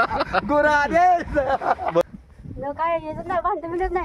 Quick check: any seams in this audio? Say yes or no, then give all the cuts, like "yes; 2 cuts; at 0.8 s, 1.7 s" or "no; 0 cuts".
yes; 1 cut; at 2.1 s